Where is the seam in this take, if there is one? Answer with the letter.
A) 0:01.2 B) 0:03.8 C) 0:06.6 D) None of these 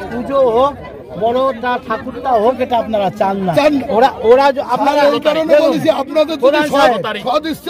B